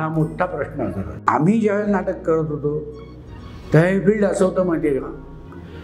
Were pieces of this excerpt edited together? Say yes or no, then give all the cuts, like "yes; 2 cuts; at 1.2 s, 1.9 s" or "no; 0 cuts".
yes; 1 cut; at 1.2 s